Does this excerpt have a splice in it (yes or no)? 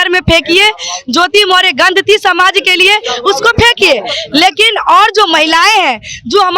no